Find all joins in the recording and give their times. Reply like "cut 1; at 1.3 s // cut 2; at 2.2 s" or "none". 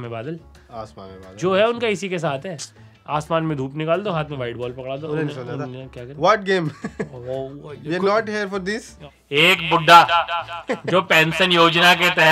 cut 1; at 9.1 s